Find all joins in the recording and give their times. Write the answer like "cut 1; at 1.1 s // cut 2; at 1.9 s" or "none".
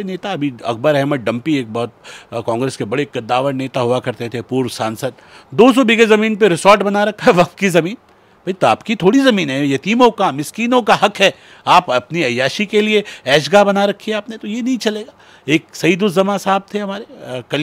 none

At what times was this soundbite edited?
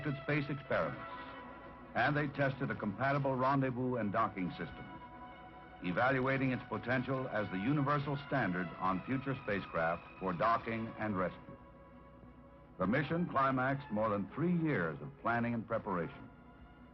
none

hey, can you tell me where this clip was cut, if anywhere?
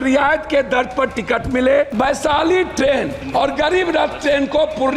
cut 1; at 1.9 s // cut 2; at 3.2 s

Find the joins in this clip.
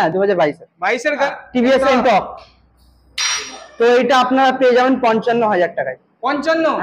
cut 1; at 1.2 s

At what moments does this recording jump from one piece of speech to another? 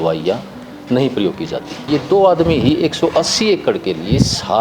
cut 1; at 1.9 s

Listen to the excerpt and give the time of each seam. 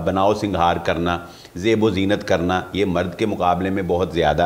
none

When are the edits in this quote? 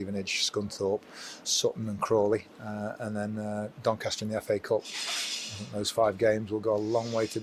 none

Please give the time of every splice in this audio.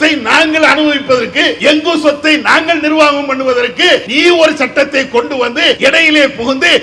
cut 1; at 1.5 s // cut 2; at 4.1 s // cut 3; at 5.8 s

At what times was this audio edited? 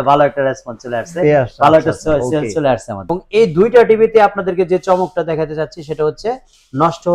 cut 1; at 3.0 s

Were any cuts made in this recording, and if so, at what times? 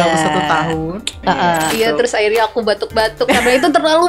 cut 1; at 1.7 s

